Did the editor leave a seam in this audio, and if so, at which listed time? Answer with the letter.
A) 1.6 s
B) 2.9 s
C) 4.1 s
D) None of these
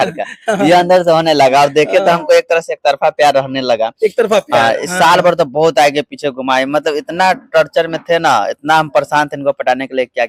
D